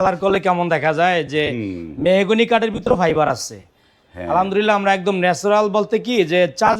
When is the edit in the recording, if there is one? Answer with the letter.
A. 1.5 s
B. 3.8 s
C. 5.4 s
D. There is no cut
D